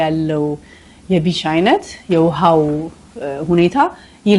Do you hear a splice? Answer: no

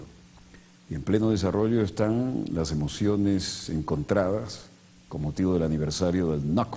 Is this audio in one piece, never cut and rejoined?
yes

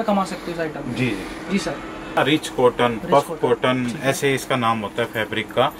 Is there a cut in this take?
yes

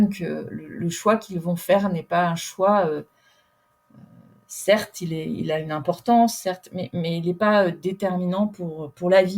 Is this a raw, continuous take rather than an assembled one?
yes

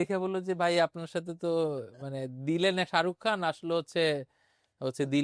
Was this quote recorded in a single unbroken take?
yes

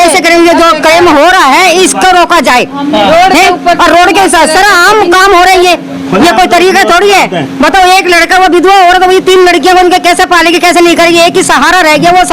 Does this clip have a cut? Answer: no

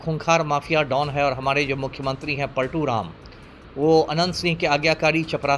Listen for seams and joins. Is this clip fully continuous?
yes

